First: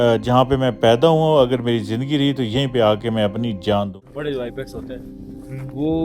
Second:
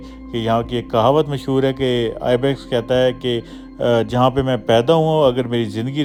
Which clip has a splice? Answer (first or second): first